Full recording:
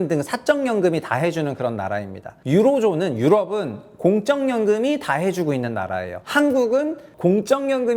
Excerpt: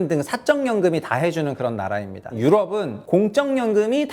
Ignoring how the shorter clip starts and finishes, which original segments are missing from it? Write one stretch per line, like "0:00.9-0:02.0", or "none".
0:02.3-0:03.1
0:03.7-0:03.9